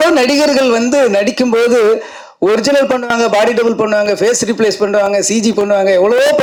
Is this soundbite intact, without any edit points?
yes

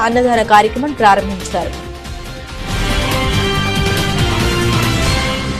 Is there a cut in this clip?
yes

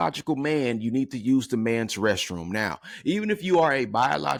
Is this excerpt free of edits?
yes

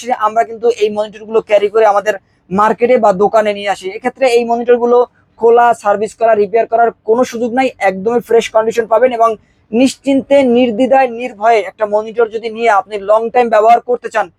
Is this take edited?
no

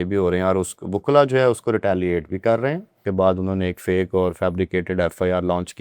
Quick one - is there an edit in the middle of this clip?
yes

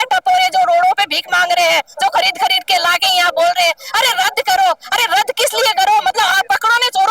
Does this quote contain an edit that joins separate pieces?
no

